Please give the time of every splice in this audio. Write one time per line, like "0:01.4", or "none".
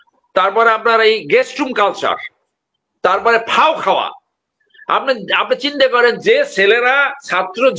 none

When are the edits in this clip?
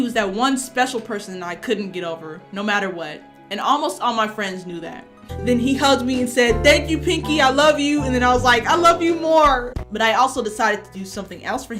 0:05.2
0:09.7

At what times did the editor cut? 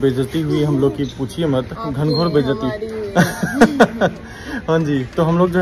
none

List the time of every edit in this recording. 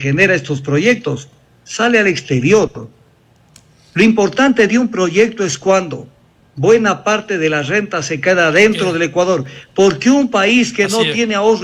none

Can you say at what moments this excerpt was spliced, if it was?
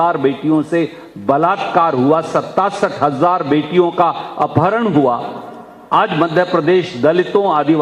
none

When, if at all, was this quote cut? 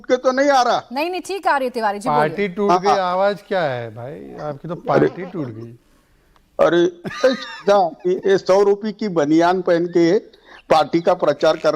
0:04.3

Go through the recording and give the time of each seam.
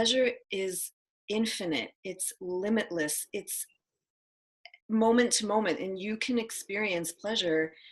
none

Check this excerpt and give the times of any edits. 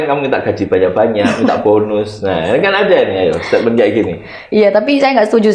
none

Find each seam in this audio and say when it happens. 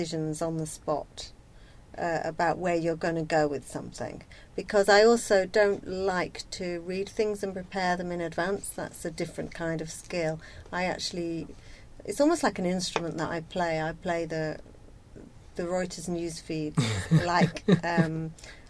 none

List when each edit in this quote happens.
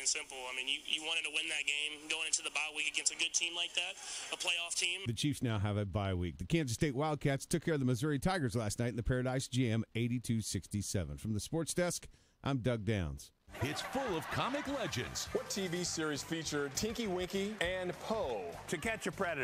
0:13.2

